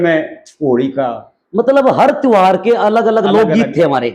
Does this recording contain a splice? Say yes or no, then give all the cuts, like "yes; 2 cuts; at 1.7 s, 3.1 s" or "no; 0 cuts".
no; 0 cuts